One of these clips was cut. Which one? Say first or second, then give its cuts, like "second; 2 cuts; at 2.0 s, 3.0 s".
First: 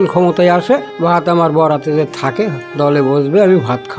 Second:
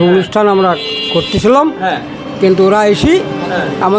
first; 2 cuts; at 0.9 s, 2.6 s